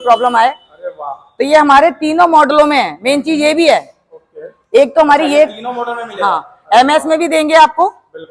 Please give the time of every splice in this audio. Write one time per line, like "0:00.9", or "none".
none